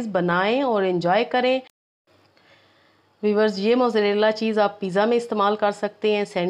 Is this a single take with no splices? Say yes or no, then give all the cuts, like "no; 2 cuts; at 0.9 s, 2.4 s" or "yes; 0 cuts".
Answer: no; 1 cut; at 1.8 s